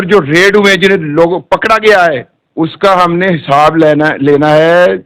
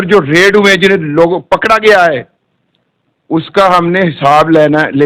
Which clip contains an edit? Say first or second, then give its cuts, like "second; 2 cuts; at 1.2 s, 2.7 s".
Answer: first; 1 cut; at 2.4 s